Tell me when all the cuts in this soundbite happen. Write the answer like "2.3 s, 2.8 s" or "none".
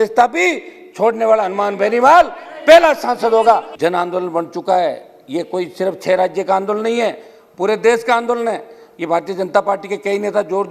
3.7 s